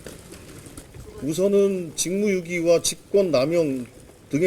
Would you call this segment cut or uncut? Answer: cut